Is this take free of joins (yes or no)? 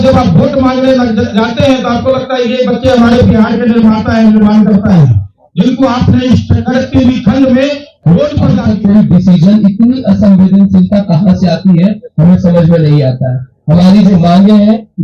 no